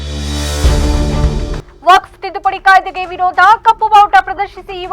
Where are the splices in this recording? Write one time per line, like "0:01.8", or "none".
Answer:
0:01.6